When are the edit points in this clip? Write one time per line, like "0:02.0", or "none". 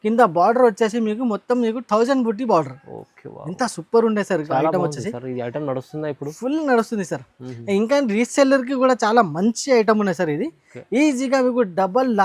none